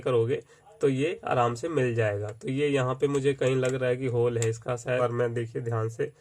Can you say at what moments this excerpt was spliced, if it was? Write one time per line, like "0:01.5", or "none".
0:05.0